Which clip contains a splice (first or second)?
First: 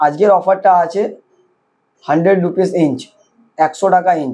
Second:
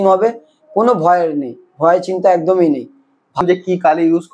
second